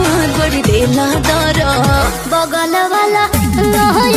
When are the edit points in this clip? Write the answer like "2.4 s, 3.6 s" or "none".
2.0 s